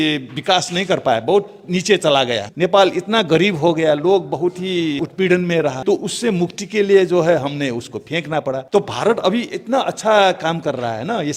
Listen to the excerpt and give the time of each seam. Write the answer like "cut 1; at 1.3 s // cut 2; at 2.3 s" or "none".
cut 1; at 2.5 s // cut 2; at 5.0 s // cut 3; at 5.8 s // cut 4; at 8.6 s